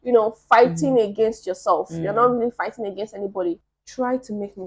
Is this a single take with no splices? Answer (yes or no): no